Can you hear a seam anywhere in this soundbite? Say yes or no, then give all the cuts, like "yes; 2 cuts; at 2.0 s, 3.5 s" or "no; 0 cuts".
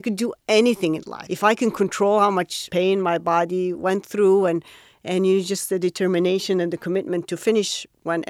yes; 2 cuts; at 1.2 s, 2.6 s